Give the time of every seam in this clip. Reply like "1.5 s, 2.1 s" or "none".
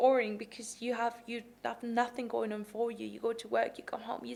none